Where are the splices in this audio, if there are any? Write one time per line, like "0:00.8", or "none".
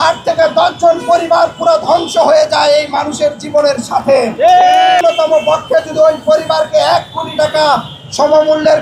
0:05.0